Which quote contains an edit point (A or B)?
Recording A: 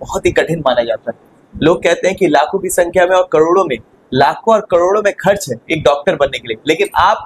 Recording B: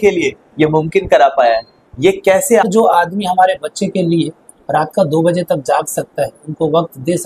B